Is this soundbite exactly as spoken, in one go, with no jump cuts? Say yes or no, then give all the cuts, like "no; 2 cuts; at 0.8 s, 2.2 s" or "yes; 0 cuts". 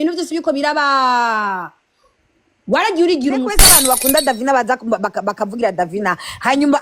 no; 1 cut; at 3.7 s